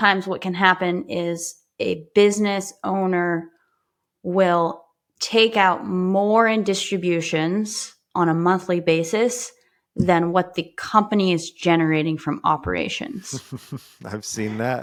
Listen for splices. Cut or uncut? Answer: uncut